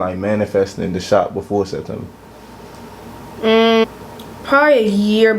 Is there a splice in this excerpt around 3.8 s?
yes; 1 cut; at 3.8 s

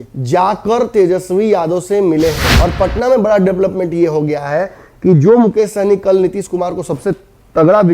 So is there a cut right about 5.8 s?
no; 1 cut; at 2.5 s

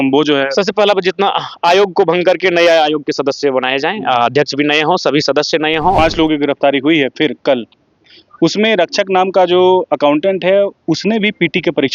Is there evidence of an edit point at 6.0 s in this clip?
yes; 1 cut; at 6.0 s

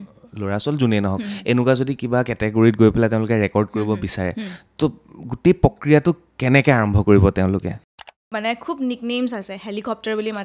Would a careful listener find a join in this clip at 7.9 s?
yes; 1 cut; at 7.9 s

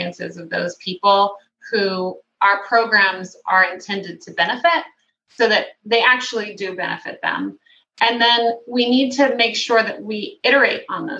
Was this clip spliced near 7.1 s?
no; 0 cuts

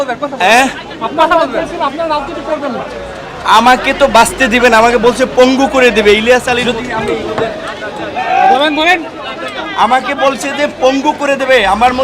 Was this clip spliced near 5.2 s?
no; 1 cut; at 6.6 s

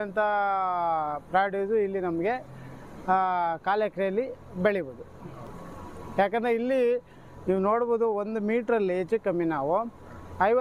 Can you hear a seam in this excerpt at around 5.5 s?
no; 0 cuts

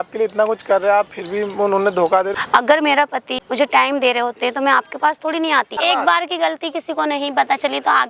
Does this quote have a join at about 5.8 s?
yes; 3 cuts; at 2.3 s, 3.4 s, 5.8 s

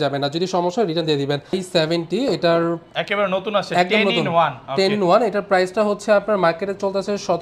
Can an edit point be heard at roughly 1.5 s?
yes; 1 cut; at 1.5 s

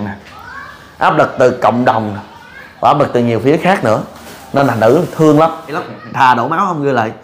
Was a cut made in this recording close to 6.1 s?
yes; 1 cut; at 6.1 s

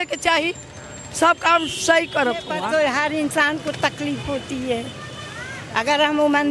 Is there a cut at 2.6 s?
yes; 1 cut; at 2.6 s

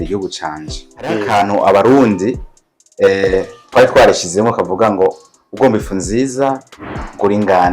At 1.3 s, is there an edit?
yes; 1 cut; at 1.3 s

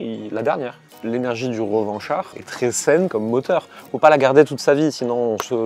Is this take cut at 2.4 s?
yes; 2 cuts; at 0.8 s, 2.4 s

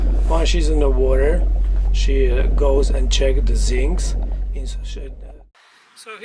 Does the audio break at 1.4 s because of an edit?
no; 1 cut; at 5.3 s

